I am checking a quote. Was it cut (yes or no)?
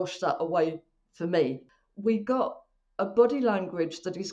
yes